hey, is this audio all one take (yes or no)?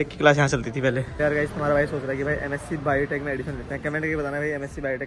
no